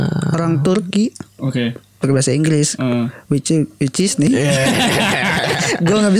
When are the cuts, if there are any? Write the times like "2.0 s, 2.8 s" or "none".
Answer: none

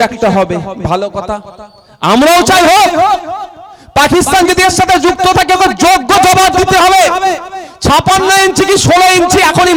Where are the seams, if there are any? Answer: none

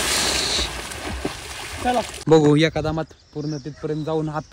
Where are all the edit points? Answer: 2.1 s

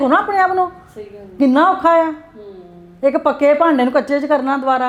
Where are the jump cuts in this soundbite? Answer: none

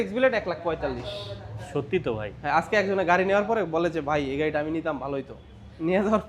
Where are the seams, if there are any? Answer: none

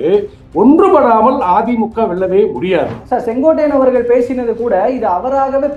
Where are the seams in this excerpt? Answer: 3.0 s

